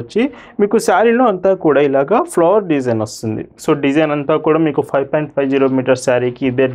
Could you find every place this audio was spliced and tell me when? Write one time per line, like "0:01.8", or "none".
none